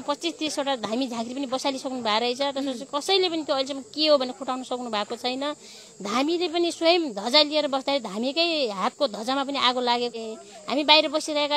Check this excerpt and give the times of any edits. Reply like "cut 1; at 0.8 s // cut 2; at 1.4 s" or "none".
cut 1; at 10.2 s